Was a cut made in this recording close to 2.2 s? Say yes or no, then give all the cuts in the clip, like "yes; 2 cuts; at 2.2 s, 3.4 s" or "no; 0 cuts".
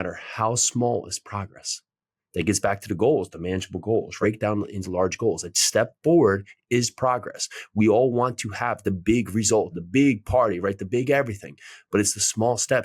no; 2 cuts; at 4.1 s, 9.8 s